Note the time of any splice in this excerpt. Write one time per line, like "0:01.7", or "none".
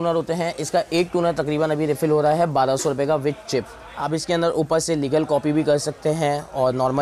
0:04.1